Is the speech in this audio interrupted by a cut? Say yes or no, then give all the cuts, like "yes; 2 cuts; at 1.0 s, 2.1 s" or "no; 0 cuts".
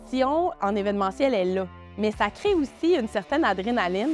no; 0 cuts